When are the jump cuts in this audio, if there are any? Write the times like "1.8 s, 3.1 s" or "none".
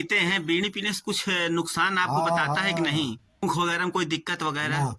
3.4 s